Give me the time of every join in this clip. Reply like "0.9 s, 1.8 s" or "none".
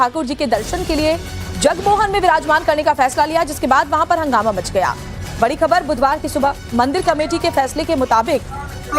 4.2 s